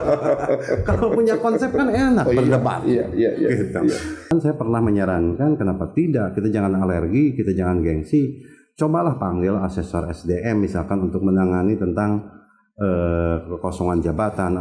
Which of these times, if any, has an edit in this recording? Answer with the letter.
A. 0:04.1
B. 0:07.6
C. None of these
A